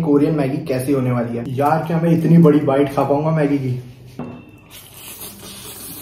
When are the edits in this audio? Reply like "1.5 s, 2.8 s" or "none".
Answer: 1.4 s, 4.2 s